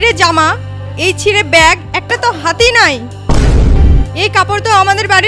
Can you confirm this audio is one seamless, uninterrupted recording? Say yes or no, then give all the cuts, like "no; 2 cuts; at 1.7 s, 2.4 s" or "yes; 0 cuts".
no; 1 cut; at 4.1 s